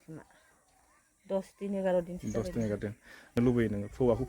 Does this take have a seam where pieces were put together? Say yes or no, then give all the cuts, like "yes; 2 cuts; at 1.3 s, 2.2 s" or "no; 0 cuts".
yes; 1 cut; at 3.4 s